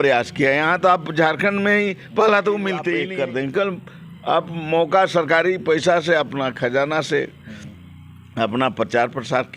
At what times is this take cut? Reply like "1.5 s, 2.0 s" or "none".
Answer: 3.1 s